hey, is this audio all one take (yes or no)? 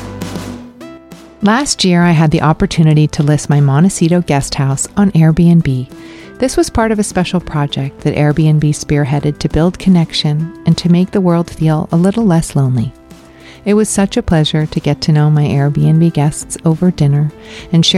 yes